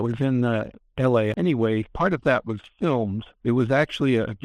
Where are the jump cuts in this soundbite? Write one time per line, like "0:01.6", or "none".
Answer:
0:01.3
0:03.3